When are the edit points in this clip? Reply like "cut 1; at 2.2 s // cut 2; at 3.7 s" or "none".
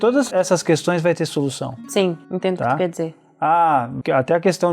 none